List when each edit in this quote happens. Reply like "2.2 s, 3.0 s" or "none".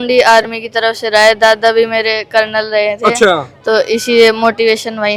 none